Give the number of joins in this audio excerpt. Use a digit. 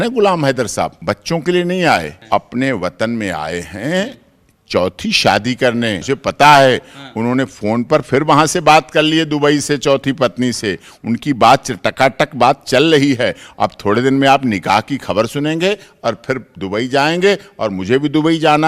3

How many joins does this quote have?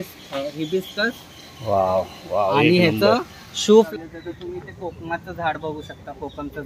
1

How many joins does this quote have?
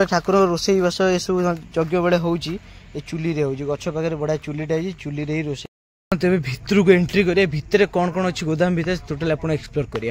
1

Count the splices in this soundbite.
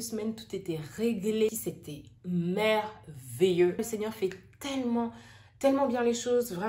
2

